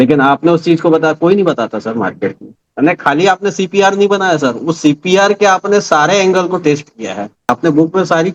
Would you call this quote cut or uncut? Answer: cut